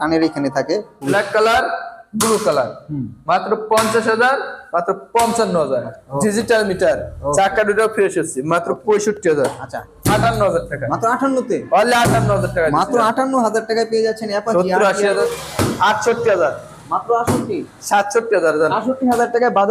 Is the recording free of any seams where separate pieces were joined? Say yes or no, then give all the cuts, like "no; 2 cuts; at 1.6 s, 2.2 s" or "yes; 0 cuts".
no; 4 cuts; at 0.9 s, 6.0 s, 9.9 s, 15.2 s